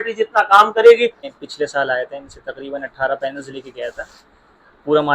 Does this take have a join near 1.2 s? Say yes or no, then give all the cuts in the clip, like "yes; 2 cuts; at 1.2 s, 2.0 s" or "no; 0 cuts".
yes; 1 cut; at 1.2 s